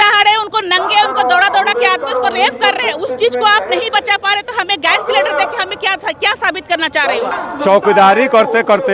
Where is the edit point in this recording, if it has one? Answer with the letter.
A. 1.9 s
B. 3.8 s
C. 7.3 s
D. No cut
C